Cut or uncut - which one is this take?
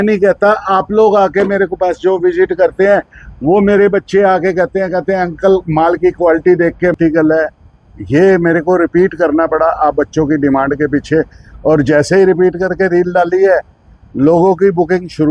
cut